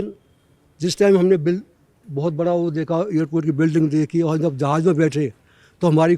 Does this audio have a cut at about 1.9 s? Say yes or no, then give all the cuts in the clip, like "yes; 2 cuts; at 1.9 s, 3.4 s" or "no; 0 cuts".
no; 0 cuts